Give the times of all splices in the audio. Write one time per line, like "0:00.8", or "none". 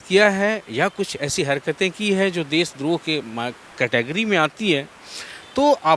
none